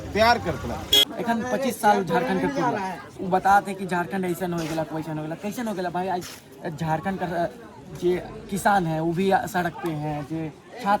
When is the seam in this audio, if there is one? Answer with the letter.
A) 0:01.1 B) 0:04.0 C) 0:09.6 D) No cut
A